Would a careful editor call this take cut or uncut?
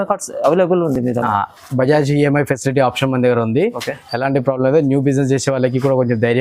uncut